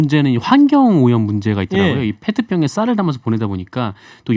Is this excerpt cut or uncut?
uncut